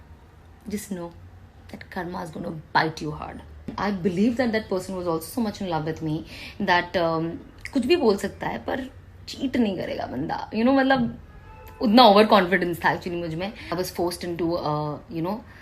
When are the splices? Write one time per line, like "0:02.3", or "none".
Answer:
0:03.8
0:13.6